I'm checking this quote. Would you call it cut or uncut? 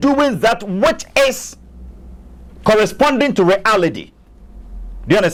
uncut